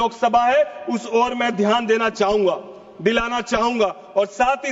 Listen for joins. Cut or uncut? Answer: uncut